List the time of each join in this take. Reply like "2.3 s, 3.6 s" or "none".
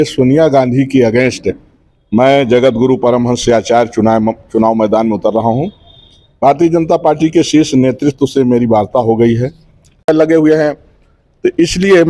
10.1 s